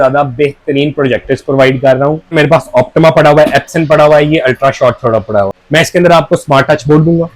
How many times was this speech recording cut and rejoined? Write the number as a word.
two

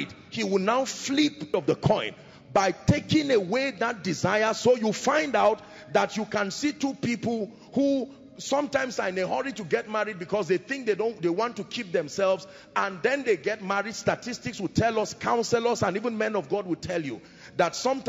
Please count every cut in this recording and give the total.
one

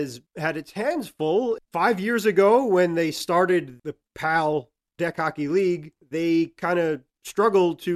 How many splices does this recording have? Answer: one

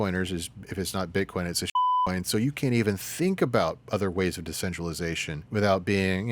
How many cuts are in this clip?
one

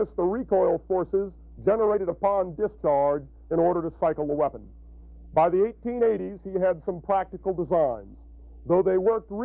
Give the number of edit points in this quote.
zero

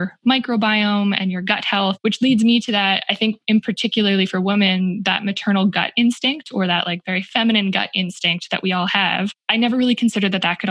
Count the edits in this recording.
two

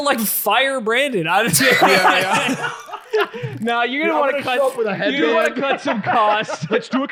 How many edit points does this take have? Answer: zero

